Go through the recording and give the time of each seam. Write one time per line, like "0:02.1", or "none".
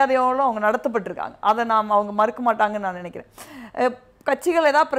none